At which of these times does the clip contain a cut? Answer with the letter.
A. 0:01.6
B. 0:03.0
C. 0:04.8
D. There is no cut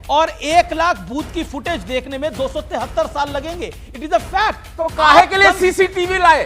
C